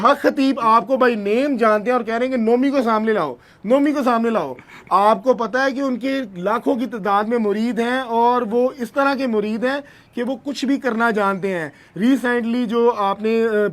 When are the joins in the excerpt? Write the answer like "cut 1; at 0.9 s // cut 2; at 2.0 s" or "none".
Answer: none